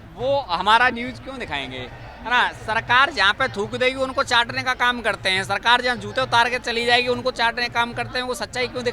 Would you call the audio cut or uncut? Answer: uncut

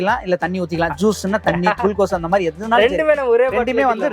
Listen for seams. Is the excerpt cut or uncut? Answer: uncut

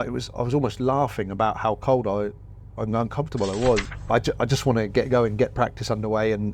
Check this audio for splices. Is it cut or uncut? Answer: cut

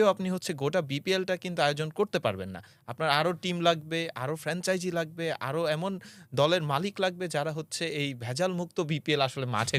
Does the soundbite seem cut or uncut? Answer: uncut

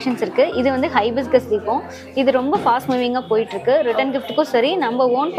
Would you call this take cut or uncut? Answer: uncut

